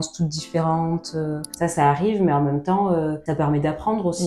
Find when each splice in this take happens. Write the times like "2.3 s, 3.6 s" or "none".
1.5 s